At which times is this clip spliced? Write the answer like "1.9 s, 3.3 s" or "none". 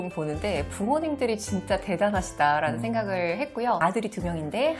3.8 s